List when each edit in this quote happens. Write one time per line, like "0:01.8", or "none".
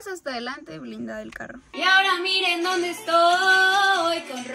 0:01.7